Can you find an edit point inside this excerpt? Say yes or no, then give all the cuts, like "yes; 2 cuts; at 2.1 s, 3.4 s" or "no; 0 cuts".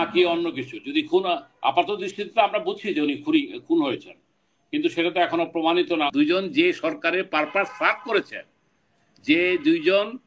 yes; 1 cut; at 6.1 s